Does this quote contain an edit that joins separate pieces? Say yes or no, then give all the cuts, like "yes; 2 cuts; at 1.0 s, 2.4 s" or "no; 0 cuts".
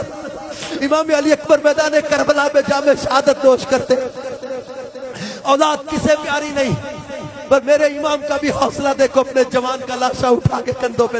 no; 0 cuts